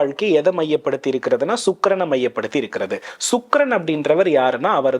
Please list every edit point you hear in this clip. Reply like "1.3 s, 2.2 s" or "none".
none